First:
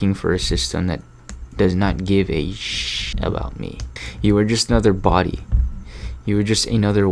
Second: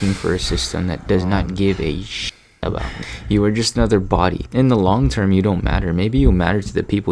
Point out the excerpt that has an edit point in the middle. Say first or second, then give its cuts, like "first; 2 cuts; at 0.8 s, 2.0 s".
second; 3 cuts; at 1.0 s, 2.7 s, 4.4 s